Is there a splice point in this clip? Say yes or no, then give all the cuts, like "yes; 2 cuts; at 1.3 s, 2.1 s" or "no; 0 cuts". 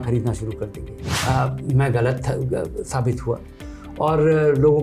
yes; 1 cut; at 1.1 s